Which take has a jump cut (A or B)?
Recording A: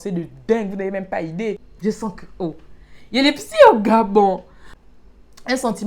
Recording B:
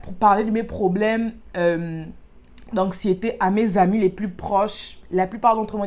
A